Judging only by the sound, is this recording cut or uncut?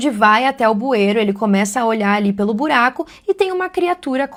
uncut